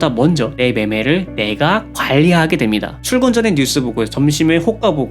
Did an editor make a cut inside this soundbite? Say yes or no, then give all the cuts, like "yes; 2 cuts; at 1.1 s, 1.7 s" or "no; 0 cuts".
yes; 1 cut; at 3.0 s